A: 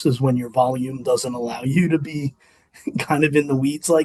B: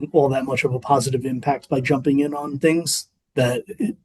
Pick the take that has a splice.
B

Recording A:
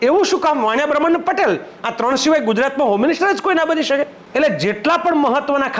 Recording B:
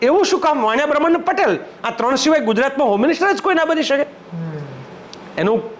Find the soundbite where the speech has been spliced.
A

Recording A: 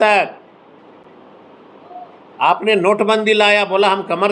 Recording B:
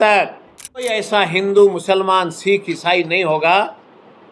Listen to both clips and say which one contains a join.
B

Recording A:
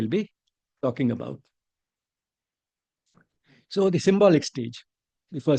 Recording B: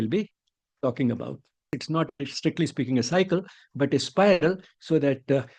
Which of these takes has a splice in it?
B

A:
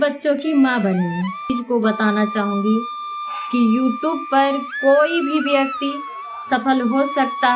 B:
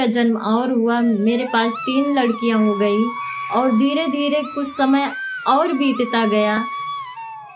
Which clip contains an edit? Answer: A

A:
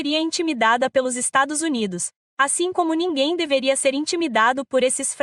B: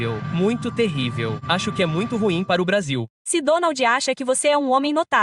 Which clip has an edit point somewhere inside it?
B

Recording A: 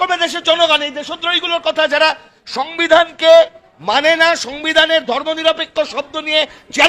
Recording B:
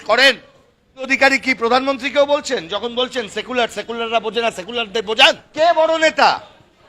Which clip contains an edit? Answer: B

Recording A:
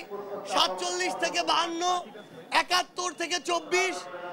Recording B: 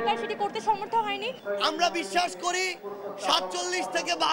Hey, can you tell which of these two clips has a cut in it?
B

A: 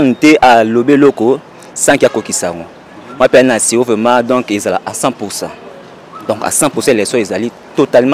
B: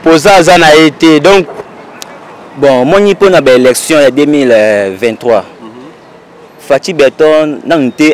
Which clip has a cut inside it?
B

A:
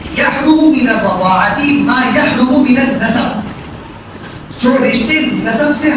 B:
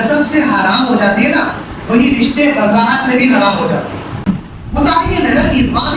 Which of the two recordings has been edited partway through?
B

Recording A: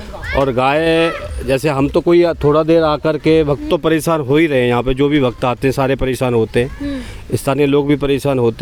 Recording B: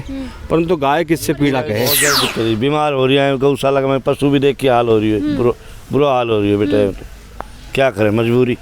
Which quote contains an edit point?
B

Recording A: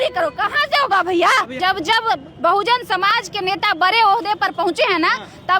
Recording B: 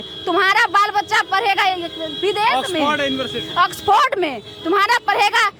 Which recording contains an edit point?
A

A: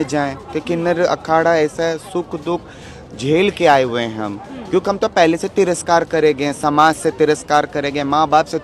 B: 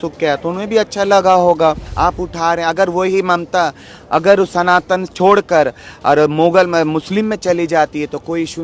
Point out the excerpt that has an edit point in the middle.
B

